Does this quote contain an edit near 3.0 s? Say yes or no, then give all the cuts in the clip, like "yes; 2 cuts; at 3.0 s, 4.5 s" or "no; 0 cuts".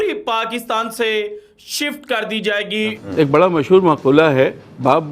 yes; 1 cut; at 3.0 s